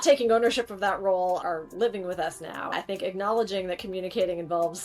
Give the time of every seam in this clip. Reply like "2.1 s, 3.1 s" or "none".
2.7 s

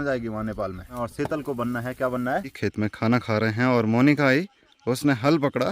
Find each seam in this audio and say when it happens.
1.0 s, 2.6 s

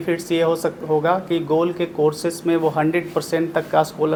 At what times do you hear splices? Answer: none

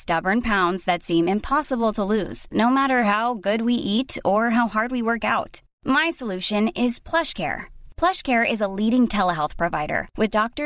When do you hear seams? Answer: none

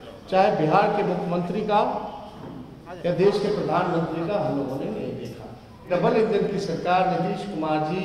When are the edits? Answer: 5.9 s

